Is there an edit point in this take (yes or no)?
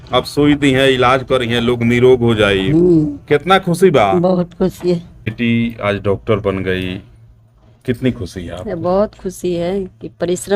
yes